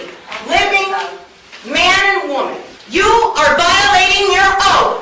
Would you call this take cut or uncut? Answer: cut